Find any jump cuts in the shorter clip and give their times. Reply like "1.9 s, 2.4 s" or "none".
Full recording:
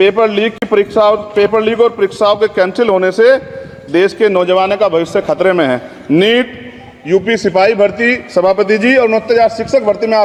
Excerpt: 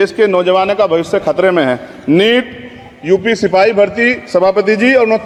none